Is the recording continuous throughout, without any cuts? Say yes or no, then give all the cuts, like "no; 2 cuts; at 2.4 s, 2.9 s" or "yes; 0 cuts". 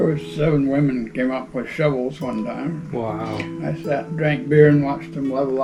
yes; 0 cuts